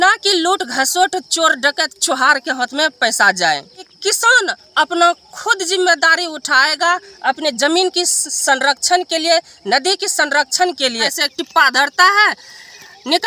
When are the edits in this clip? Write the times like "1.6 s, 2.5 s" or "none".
3.9 s, 11.2 s